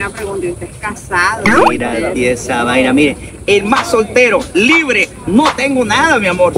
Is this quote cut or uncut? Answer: uncut